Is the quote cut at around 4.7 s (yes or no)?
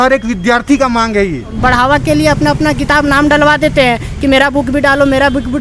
no